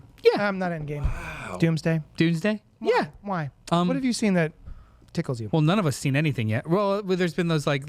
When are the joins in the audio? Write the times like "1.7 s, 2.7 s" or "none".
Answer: 3.5 s